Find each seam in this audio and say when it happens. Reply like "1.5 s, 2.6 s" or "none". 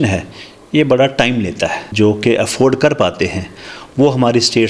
1.8 s